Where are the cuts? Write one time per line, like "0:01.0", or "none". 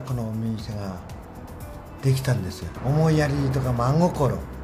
0:02.7